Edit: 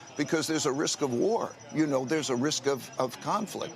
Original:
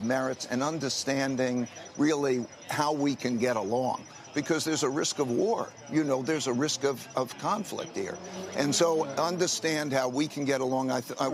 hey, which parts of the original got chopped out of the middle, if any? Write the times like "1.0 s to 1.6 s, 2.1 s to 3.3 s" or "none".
none